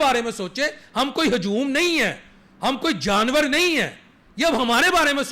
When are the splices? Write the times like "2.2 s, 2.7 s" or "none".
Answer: none